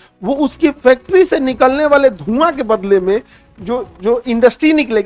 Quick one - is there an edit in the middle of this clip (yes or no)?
no